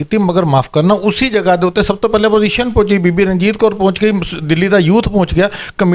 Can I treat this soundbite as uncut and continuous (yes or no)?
yes